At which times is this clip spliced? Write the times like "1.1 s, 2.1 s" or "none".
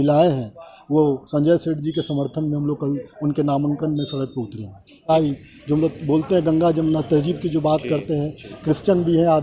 5.1 s